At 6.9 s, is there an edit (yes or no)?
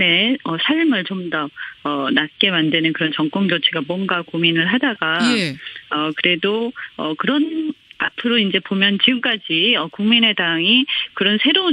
no